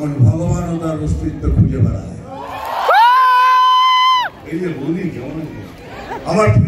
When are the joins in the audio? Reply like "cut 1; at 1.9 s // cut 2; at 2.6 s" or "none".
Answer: cut 1; at 4.4 s // cut 2; at 5.8 s